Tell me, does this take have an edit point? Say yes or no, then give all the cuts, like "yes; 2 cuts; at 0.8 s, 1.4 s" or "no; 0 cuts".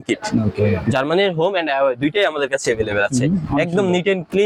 no; 0 cuts